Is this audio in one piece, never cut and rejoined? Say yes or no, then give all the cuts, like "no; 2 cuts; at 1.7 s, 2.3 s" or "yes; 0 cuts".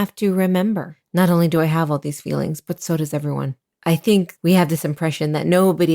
no; 3 cuts; at 1.0 s, 3.6 s, 4.3 s